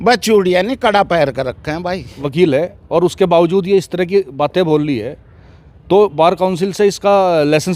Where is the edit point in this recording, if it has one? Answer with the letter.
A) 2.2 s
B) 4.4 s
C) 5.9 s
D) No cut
A